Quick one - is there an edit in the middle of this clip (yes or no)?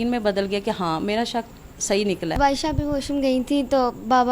yes